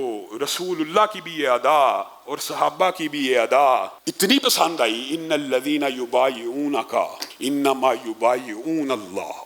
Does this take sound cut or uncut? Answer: cut